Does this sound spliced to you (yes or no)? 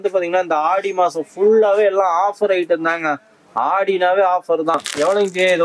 yes